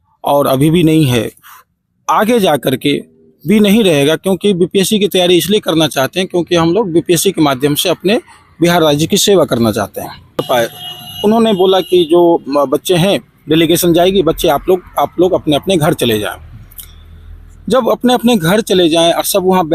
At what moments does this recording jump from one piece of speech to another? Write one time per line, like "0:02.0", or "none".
0:10.4